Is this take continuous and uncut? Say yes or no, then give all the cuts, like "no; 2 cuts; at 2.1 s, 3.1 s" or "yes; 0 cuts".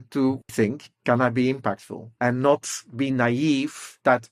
yes; 0 cuts